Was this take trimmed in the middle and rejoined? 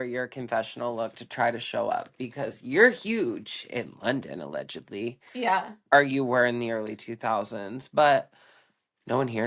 no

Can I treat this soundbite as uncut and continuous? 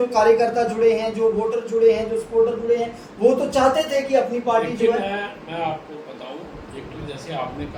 yes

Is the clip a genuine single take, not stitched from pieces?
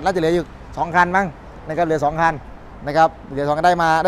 yes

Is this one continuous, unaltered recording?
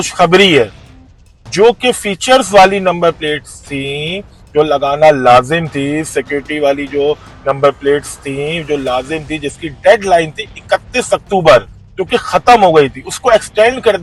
yes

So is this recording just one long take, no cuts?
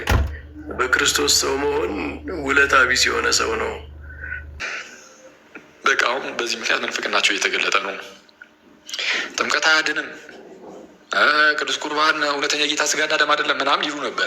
no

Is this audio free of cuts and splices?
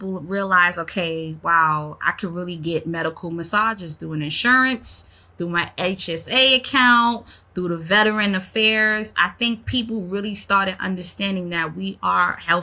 yes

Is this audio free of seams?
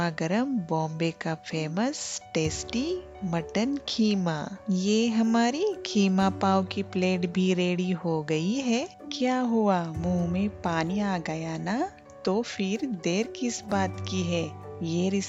yes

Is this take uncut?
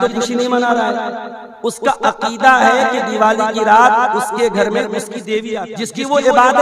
no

